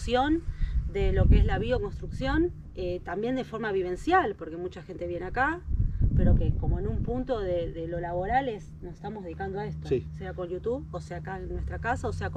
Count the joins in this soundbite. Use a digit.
0